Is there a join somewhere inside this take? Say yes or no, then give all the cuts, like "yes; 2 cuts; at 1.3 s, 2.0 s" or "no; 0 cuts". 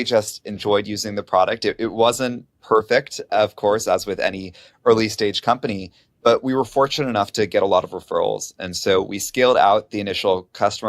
yes; 1 cut; at 3.3 s